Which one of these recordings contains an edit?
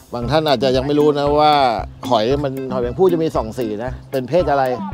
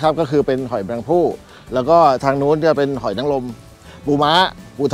first; 1 cut; at 4.0 s

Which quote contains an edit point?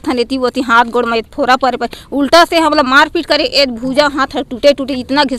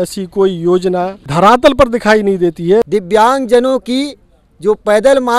second; 2 cuts; at 1.2 s, 2.9 s

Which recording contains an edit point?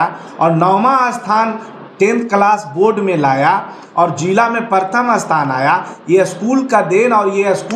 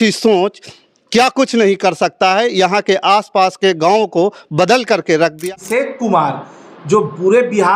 second; 1 cut; at 5.5 s

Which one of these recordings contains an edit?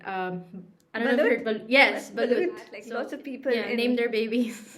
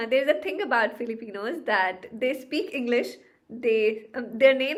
first; 1 cut; at 2.8 s

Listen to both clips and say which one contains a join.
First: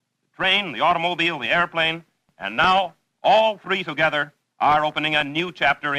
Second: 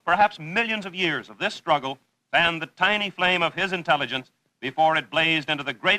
second; 1 cut; at 2.2 s

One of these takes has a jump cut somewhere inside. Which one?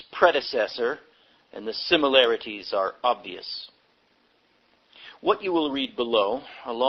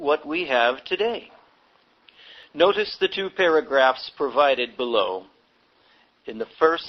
second; 1 cut; at 3.7 s

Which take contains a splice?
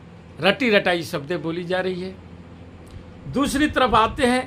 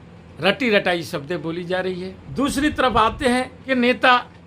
second; 2 cuts; at 2.2 s, 3.6 s

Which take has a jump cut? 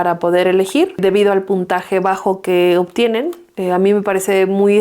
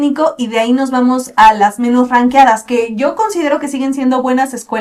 first; 1 cut; at 1.0 s

